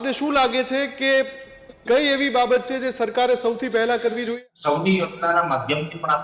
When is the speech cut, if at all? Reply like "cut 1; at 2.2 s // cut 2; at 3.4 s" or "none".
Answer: cut 1; at 4.3 s